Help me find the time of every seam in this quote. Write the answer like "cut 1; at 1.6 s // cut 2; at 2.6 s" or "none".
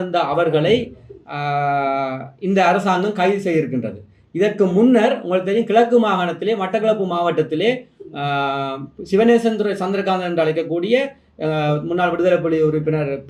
none